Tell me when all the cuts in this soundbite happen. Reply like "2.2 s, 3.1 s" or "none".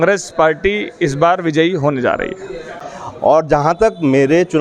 2.7 s